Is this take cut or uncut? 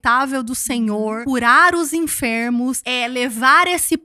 cut